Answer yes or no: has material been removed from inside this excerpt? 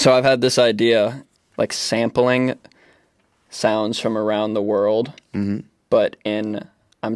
yes